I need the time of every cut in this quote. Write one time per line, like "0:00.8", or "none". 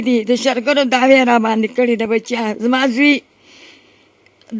none